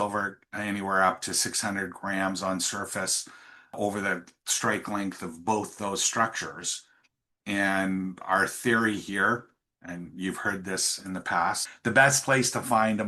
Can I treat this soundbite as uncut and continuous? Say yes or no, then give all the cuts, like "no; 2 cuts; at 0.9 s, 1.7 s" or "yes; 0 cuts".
no; 1 cut; at 3.7 s